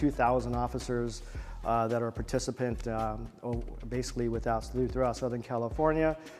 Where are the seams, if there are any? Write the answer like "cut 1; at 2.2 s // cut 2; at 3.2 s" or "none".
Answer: none